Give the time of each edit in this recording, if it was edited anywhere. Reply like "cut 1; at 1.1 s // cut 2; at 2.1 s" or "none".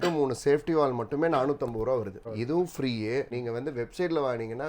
cut 1; at 2.2 s // cut 2; at 3.3 s